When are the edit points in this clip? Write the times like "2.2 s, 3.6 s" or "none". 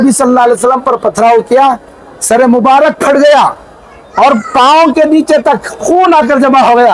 none